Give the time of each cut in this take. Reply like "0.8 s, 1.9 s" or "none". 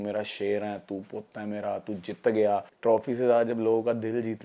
2.7 s